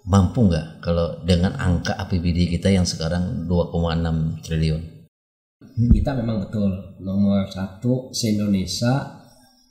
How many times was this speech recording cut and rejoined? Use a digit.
1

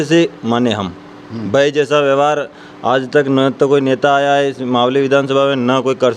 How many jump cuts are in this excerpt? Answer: 0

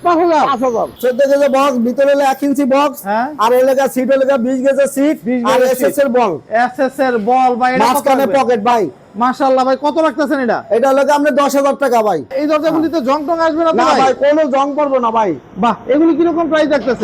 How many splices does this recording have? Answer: 2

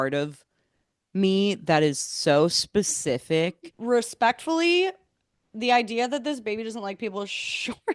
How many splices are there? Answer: 1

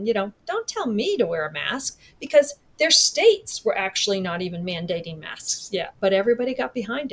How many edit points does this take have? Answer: 1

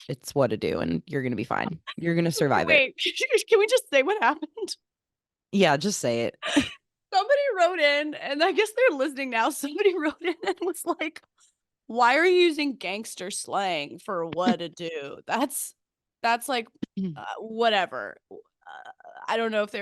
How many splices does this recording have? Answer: 0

